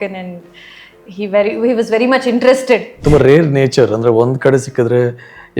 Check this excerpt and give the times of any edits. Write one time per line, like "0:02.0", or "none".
0:03.0